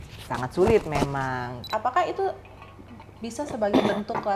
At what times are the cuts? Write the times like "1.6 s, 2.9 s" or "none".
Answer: 1.7 s